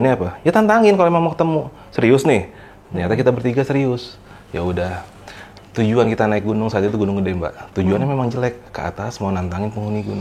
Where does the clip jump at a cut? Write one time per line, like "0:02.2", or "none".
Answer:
none